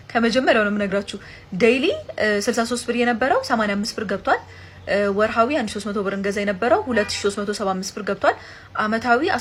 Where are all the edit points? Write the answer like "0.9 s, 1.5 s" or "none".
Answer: none